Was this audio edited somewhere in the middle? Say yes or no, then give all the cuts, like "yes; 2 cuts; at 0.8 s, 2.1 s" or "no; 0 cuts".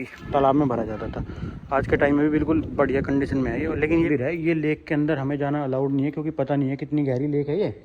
yes; 1 cut; at 4.1 s